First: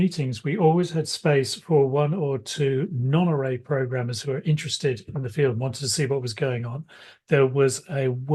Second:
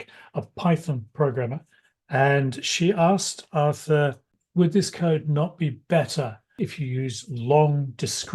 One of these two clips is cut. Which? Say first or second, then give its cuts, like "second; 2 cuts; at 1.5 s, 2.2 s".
second; 2 cuts; at 4.3 s, 6.5 s